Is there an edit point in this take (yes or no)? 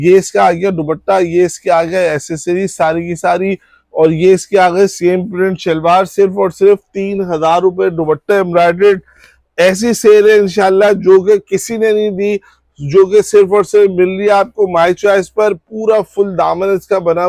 no